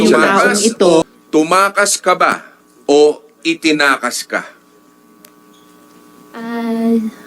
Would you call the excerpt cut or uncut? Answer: cut